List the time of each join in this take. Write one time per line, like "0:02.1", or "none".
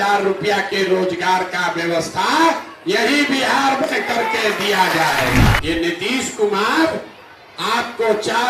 0:05.6